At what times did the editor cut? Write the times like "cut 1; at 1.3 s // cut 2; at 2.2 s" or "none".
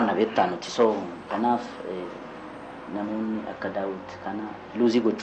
none